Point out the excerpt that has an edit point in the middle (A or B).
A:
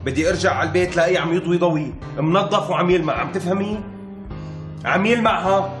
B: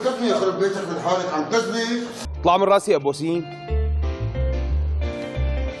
B